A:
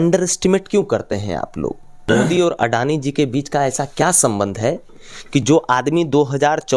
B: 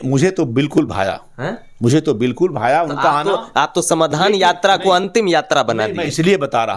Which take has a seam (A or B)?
A